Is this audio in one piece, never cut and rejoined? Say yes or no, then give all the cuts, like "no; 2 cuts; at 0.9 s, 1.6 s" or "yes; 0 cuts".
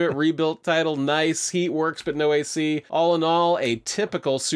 yes; 0 cuts